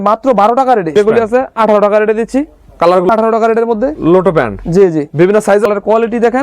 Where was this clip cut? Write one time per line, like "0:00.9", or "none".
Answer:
0:00.9
0:03.1
0:05.7